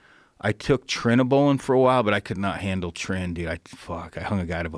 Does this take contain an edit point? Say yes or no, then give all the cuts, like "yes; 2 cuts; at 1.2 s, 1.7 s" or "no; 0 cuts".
no; 0 cuts